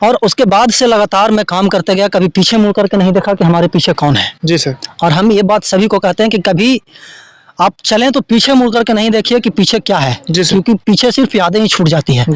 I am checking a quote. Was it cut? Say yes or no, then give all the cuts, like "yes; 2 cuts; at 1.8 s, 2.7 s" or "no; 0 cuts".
no; 0 cuts